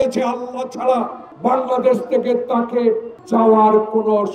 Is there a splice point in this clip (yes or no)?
yes